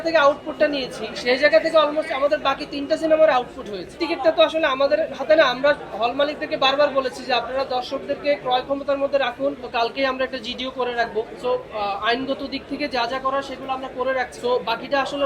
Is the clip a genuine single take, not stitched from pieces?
no; 4 cuts; at 3.9 s, 9.7 s, 11.3 s, 14.3 s

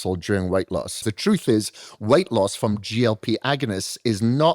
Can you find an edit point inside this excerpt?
yes; 1 cut; at 1.1 s

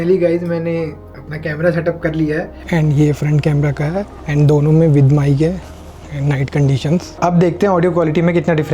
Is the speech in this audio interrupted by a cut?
yes; 3 cuts; at 2.6 s, 4.2 s, 7.2 s

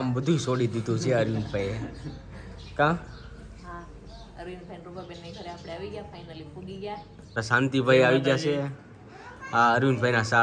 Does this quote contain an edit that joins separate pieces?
yes; 1 cut; at 7.4 s

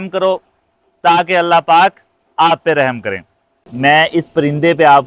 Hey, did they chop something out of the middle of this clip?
yes; 1 cut; at 3.6 s

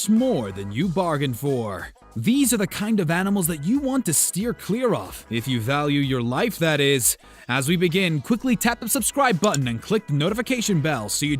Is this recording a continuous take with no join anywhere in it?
no; 1 cut; at 1.9 s

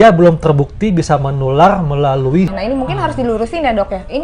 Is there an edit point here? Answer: yes; 1 cut; at 2.5 s

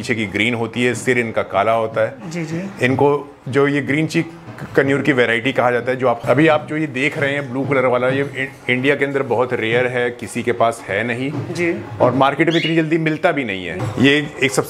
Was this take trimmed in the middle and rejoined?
yes; 2 cuts; at 6.2 s, 13.7 s

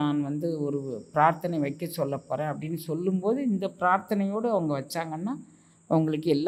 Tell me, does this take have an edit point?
no; 0 cuts

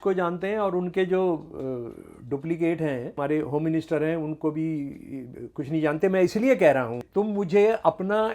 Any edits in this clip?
yes; 2 cuts; at 3.1 s, 7.1 s

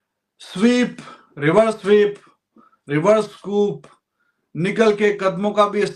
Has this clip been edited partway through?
no; 0 cuts

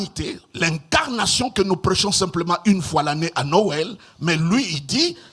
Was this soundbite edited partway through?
no; 0 cuts

